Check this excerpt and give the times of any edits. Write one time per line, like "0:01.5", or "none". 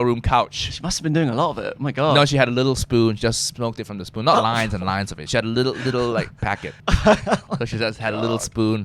0:06.7